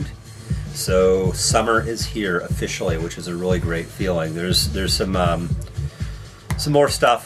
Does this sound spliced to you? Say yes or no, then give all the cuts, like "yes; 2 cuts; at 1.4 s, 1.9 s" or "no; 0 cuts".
no; 0 cuts